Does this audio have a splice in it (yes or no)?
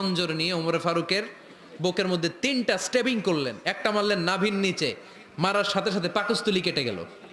no